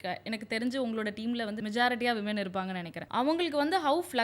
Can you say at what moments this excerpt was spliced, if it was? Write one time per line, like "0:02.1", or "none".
0:01.6
0:02.9